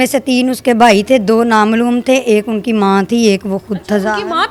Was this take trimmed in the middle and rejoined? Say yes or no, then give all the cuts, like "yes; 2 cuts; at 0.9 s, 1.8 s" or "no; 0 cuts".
no; 0 cuts